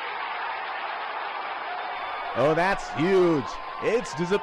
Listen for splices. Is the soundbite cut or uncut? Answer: uncut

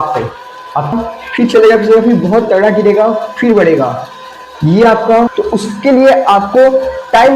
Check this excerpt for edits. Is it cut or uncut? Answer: cut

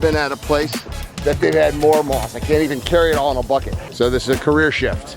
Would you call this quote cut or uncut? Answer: cut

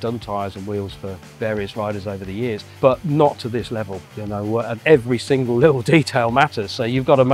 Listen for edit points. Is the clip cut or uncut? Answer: cut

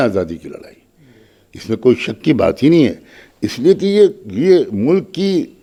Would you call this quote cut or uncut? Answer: uncut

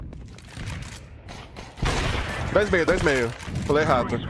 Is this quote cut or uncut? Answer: uncut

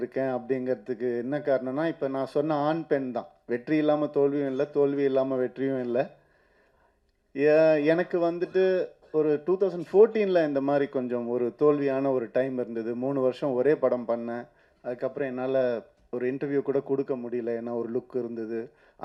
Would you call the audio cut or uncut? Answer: uncut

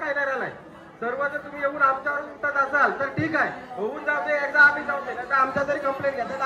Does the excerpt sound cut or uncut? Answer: uncut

